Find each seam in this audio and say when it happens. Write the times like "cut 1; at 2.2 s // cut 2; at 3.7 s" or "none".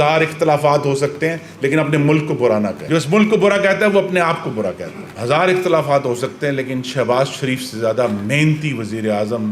cut 1; at 2.8 s // cut 2; at 5.0 s